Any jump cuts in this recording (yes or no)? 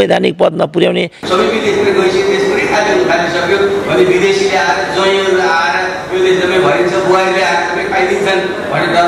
yes